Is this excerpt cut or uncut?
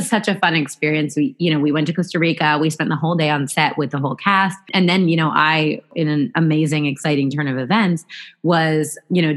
uncut